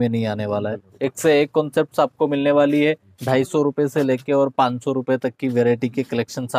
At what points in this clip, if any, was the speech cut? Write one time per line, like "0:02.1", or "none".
0:00.9
0:03.1